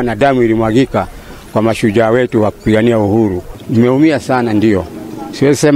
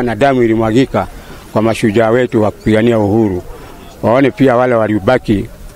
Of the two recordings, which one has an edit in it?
first; 1 cut; at 3.5 s

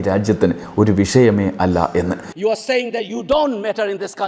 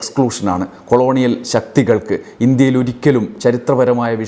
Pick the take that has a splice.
first; 1 cut; at 2.3 s

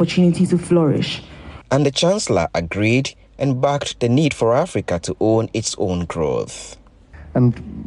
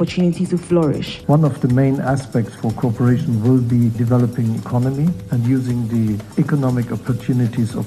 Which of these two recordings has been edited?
second; 4 cuts; at 1.1 s, 4.0 s, 5.3 s, 6.2 s

